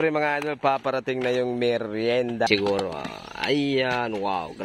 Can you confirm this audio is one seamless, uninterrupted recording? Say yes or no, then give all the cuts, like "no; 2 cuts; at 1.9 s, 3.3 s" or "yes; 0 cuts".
no; 1 cut; at 2.5 s